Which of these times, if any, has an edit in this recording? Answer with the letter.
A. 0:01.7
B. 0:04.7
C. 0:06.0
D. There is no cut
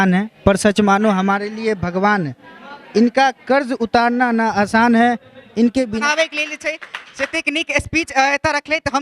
C